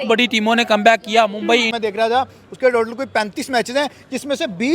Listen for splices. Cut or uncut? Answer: cut